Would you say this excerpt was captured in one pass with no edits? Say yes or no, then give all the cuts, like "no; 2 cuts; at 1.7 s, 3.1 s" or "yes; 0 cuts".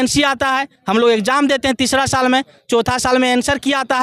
yes; 0 cuts